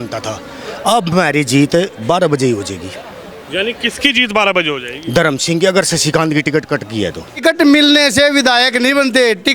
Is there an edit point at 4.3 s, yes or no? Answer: no